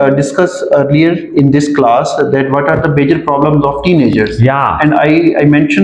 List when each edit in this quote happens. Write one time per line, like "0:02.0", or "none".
none